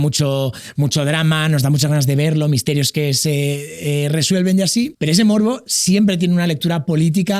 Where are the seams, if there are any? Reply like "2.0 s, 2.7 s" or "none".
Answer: 5.0 s